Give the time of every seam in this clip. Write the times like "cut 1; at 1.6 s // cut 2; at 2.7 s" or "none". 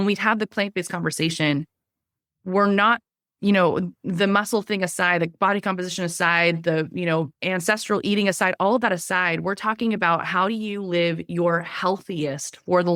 none